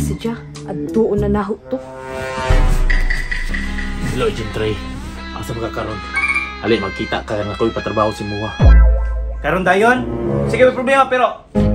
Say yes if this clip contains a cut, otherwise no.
yes